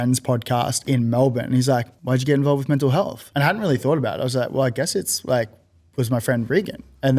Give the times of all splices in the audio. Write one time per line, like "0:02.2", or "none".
0:00.8
0:01.9
0:03.2

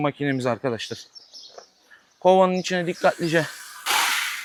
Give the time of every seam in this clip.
none

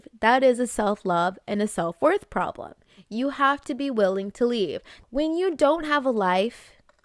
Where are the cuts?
0:04.9

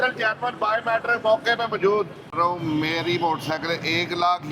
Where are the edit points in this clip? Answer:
0:02.3

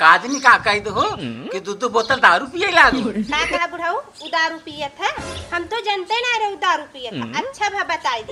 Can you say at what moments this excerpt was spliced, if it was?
none

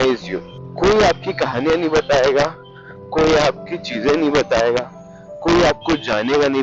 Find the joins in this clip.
none

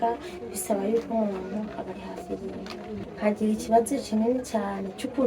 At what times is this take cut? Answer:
0:03.0

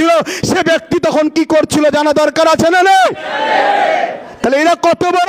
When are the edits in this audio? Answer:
none

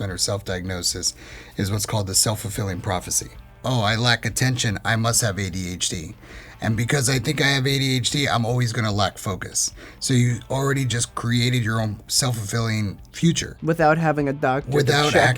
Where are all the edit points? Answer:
0:03.4
0:13.0

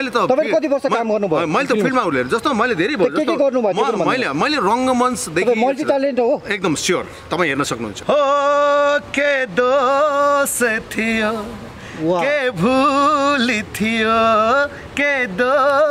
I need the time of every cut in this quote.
0:08.0

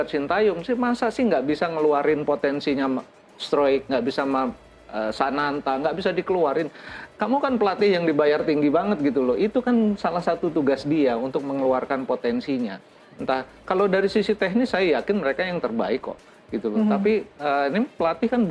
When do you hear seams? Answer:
none

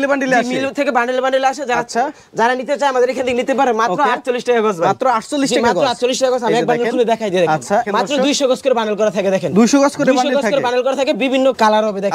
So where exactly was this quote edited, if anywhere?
none

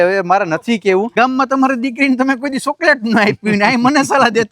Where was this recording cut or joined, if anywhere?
0:01.1

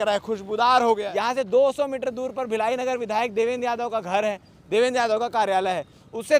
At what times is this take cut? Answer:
0:01.0

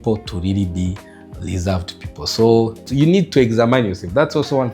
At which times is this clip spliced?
0:02.8

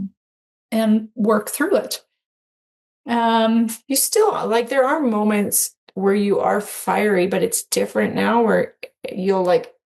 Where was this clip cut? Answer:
none

